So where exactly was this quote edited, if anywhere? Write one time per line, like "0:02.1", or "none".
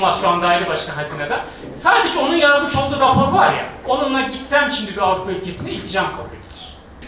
none